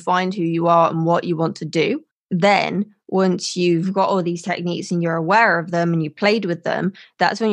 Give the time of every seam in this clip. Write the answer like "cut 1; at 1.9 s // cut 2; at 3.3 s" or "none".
none